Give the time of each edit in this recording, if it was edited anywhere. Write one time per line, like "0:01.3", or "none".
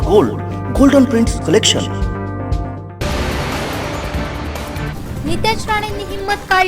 0:02.9
0:04.9